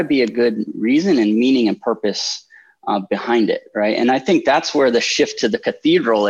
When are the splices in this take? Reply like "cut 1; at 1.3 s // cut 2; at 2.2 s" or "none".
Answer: none